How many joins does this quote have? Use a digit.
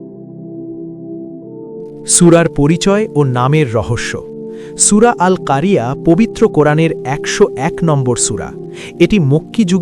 1